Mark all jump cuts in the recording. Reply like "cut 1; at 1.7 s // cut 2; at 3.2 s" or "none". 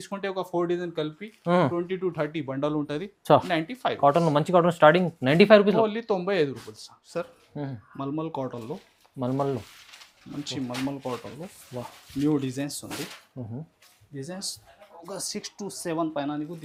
none